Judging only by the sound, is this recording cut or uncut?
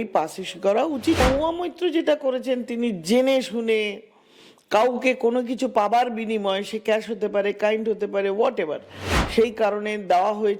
cut